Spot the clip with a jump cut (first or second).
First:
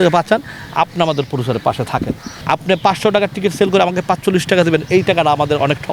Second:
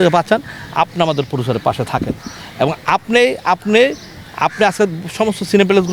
first